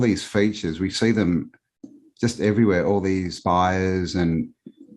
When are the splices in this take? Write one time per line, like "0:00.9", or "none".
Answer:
0:03.3